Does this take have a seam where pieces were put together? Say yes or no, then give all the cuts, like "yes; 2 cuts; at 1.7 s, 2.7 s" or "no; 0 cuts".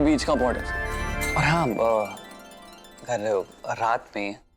yes; 1 cut; at 1.2 s